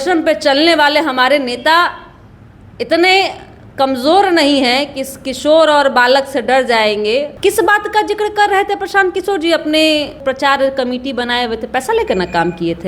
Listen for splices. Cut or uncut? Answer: cut